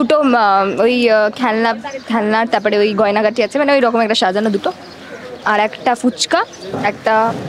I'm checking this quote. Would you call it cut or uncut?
uncut